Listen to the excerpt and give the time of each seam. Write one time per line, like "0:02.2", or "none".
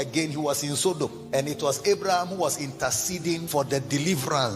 0:01.2
0:03.4